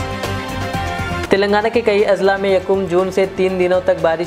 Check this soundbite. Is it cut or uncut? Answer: cut